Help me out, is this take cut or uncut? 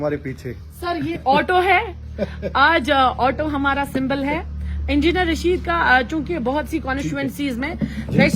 cut